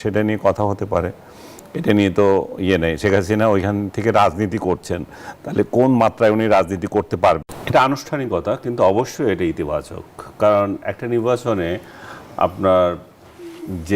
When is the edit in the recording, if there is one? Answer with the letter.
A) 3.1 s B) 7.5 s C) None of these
B